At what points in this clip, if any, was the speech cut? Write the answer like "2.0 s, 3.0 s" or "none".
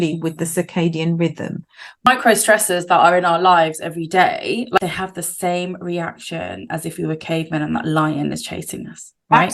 2.1 s, 4.8 s